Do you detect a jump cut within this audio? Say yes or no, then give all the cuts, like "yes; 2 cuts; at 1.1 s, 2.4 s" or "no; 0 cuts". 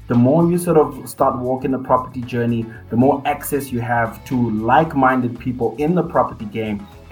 no; 0 cuts